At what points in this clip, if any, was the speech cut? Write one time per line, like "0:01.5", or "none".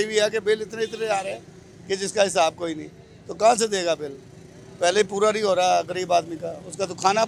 none